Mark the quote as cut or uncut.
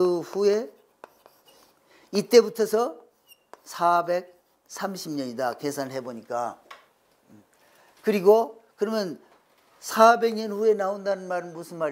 uncut